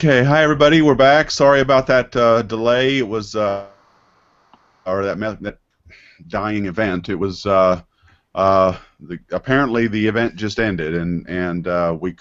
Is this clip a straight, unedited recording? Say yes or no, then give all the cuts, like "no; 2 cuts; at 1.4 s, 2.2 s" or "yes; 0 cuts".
yes; 0 cuts